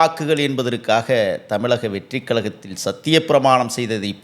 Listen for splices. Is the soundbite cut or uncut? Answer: uncut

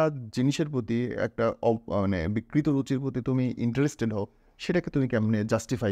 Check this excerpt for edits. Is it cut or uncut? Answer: uncut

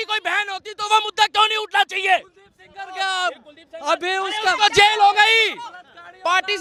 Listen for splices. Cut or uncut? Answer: uncut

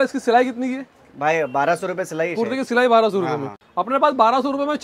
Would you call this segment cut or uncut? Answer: uncut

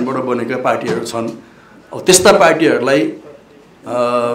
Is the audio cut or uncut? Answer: uncut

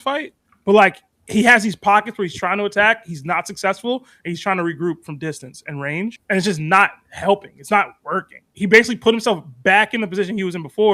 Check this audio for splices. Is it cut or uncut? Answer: uncut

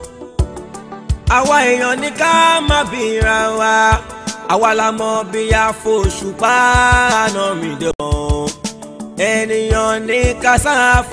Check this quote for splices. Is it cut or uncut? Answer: cut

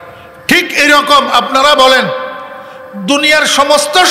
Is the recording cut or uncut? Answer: uncut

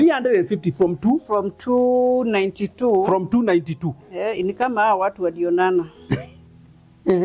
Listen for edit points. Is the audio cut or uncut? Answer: uncut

